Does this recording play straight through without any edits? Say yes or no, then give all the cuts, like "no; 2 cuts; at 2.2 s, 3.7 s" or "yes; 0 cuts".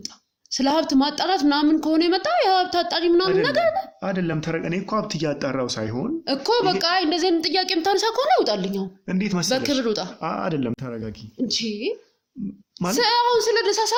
yes; 0 cuts